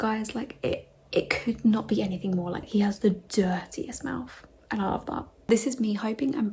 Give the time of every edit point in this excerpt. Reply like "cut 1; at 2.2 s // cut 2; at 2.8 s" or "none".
cut 1; at 2.6 s // cut 2; at 5.5 s